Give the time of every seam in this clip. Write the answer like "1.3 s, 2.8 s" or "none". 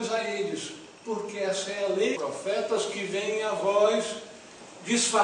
none